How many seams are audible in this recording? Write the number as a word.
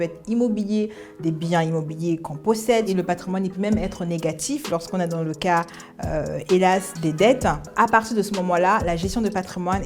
two